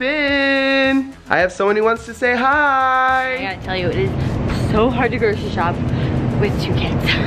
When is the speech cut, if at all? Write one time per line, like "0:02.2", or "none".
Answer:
0:01.2
0:03.6

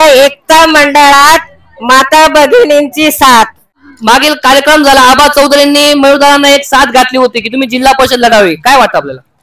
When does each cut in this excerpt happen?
0:03.9

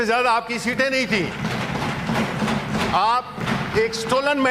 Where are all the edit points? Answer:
0:03.4

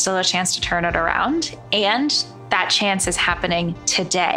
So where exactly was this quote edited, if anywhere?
none

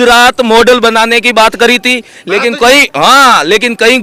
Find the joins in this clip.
none

